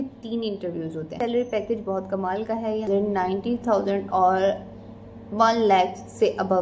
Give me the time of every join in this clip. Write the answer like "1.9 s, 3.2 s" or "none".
1.1 s, 2.9 s